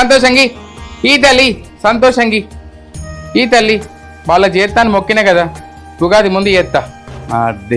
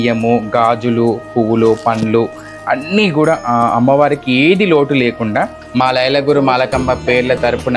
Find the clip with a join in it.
second; 1 cut; at 5.6 s

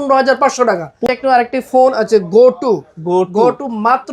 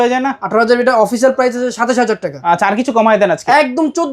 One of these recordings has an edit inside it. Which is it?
first; 1 cut; at 0.9 s

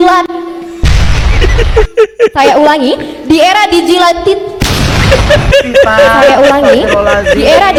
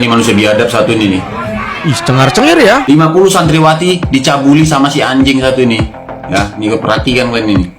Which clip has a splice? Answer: second; 1 cut; at 2.8 s

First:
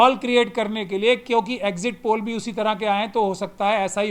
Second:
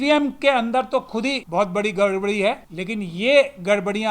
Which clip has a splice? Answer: second; 2 cuts; at 1.4 s, 2.7 s

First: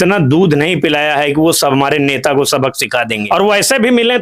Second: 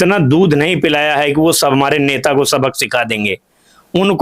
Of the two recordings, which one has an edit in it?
first; 1 cut; at 3.2 s

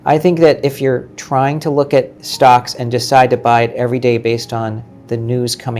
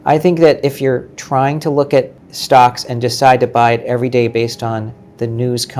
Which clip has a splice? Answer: first; 1 cut; at 2.2 s

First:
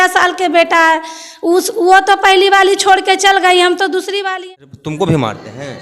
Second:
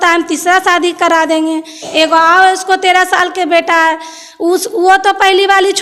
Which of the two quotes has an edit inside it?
first; 1 cut; at 4.3 s

